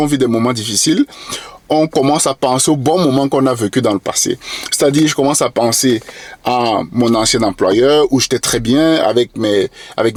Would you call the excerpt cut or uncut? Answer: uncut